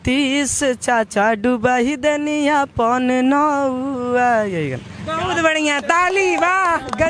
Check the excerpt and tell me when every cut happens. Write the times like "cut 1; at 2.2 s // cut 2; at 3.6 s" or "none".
none